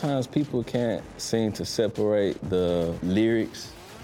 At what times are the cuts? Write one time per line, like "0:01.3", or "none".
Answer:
0:03.0